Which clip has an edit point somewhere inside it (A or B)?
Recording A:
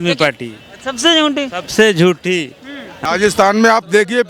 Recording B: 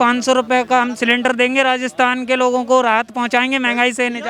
A